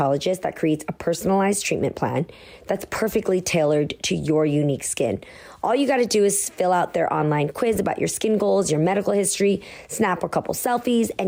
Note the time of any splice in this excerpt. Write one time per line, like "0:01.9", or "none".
none